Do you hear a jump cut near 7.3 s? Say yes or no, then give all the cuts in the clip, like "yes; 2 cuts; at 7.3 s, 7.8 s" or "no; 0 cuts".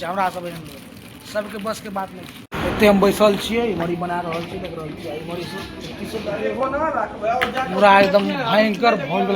no; 1 cut; at 2.4 s